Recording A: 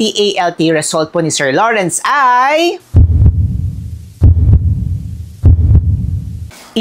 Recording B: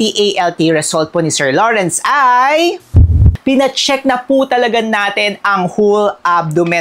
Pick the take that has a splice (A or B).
B